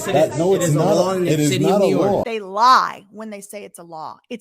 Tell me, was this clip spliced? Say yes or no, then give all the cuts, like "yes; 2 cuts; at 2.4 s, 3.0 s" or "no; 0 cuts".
no; 0 cuts